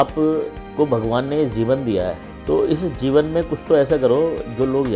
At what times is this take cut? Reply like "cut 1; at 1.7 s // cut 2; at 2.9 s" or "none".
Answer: cut 1; at 2.3 s